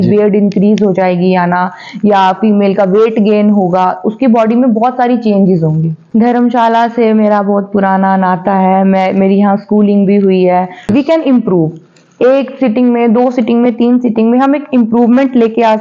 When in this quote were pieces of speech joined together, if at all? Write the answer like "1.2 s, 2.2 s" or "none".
6.0 s, 10.9 s